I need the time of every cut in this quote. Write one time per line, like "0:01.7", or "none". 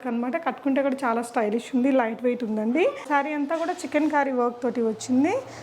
0:03.0